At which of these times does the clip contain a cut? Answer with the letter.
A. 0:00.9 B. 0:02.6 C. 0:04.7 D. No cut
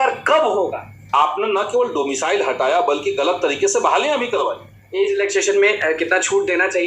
A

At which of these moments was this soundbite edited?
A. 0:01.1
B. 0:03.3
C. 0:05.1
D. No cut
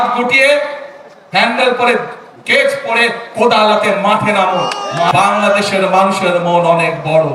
C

